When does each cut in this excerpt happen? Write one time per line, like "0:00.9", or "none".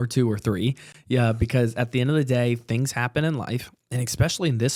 none